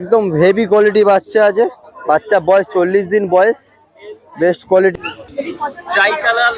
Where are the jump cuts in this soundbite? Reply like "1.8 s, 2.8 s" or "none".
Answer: 4.9 s